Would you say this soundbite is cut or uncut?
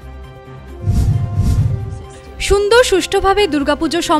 cut